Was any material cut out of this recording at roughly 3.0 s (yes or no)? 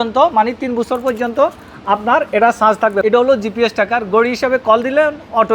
yes